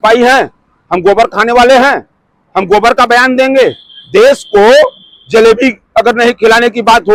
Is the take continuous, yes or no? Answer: yes